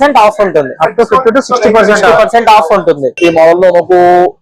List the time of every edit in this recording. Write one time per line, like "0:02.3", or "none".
0:03.1